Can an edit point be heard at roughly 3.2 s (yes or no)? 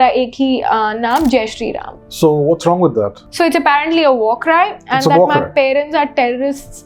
yes